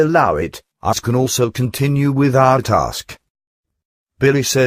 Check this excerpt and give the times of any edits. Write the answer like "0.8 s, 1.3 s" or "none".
none